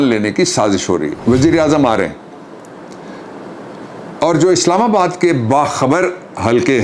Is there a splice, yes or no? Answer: yes